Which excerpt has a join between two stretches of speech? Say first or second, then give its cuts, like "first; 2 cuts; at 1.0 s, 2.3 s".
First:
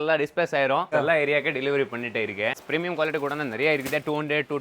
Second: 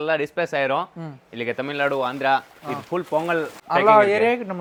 first; 2 cuts; at 0.9 s, 2.5 s